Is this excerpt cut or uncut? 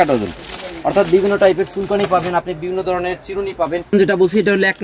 cut